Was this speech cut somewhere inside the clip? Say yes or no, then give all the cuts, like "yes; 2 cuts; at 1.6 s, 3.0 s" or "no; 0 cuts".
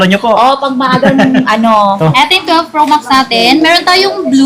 yes; 1 cut; at 2.0 s